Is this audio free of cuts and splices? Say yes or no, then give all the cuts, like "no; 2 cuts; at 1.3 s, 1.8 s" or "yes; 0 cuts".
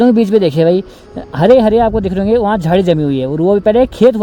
yes; 0 cuts